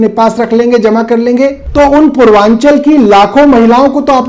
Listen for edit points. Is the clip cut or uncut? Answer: cut